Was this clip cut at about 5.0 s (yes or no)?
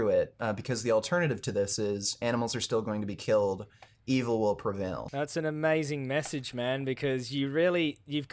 yes